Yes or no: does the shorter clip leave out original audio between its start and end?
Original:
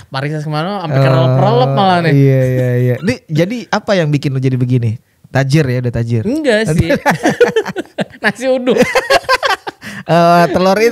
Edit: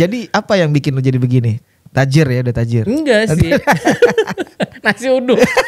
no